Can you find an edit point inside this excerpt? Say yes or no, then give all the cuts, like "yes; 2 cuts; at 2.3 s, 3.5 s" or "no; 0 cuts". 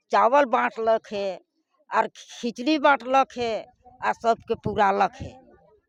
no; 0 cuts